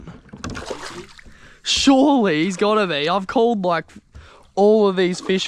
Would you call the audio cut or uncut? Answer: uncut